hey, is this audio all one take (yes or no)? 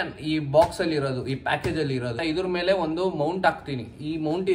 no